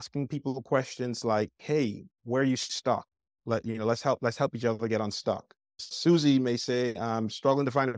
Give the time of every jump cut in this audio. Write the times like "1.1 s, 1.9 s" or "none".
2.1 s, 5.8 s, 6.9 s